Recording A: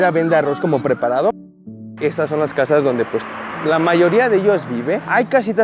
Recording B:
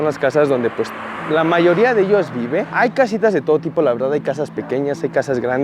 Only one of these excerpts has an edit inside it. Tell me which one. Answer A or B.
A